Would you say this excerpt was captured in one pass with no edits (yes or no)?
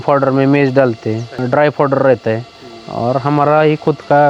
no